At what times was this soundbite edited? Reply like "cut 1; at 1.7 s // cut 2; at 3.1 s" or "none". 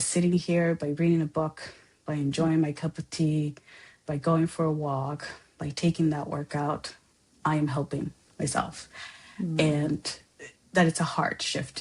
none